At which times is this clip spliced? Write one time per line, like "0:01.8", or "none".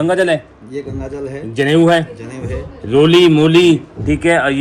none

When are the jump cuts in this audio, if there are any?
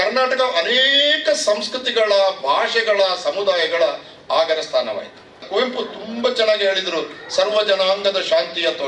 0:05.4

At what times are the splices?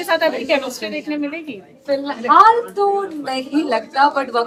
none

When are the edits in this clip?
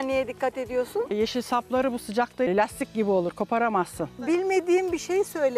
0:02.5
0:04.3

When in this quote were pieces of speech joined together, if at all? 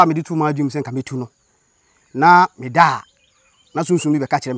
none

